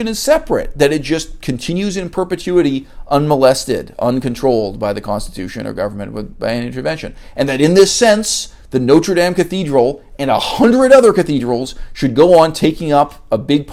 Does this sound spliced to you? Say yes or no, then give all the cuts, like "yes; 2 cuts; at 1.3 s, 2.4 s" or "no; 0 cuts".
no; 0 cuts